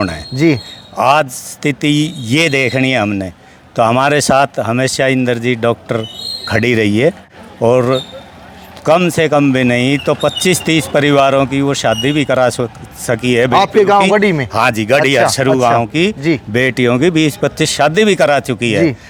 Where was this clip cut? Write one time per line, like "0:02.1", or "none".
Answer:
none